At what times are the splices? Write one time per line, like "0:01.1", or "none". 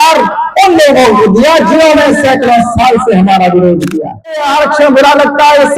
0:04.5